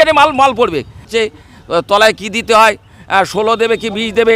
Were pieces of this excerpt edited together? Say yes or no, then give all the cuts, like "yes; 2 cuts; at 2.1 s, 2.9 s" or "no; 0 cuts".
yes; 1 cut; at 1.1 s